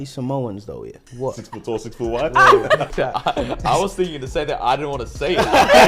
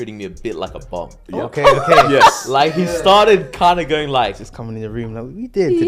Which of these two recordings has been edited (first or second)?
first